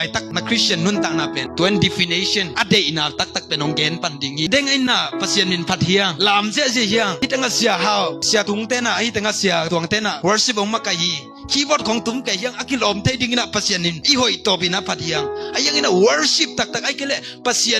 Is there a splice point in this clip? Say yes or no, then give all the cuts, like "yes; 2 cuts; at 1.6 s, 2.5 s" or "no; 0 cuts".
yes; 2 cuts; at 1.5 s, 4.5 s